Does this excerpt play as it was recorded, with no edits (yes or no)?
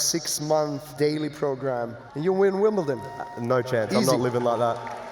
no